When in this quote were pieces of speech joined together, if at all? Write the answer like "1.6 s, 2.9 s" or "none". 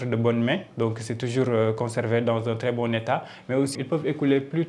none